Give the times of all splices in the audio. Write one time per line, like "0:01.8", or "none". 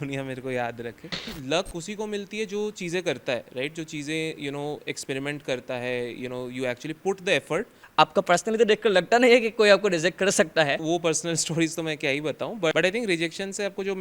0:01.3
0:07.8
0:10.8
0:12.7